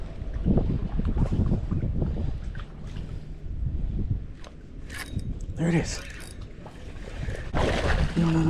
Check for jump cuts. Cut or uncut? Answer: cut